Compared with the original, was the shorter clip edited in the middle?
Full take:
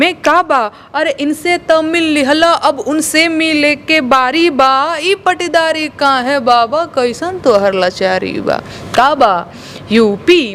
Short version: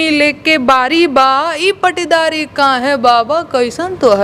no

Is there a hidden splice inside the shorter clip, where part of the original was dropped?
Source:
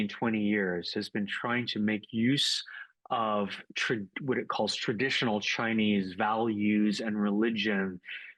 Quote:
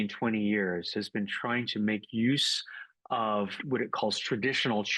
yes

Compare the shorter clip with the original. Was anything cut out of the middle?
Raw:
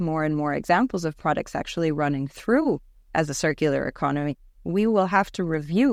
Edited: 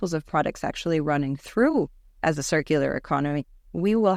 no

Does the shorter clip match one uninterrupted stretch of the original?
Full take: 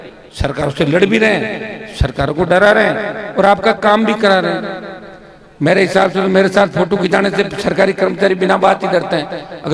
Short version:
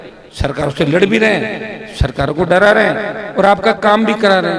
yes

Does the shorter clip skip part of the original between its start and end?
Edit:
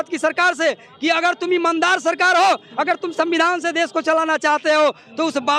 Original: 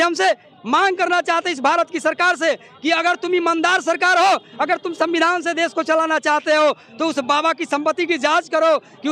no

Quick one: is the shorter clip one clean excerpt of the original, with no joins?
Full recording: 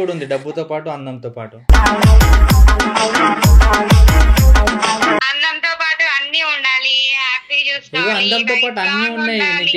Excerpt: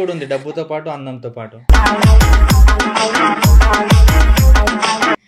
yes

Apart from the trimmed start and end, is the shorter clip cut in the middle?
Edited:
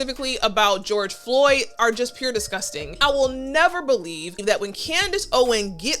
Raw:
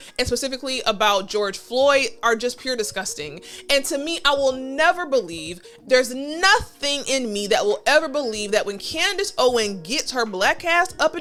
yes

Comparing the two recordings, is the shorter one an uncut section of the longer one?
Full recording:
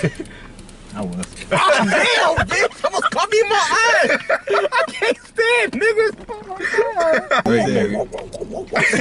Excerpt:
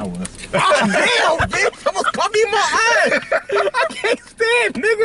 yes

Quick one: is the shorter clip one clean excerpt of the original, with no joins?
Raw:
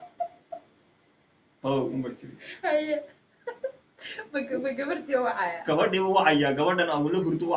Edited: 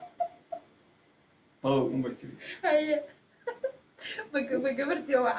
yes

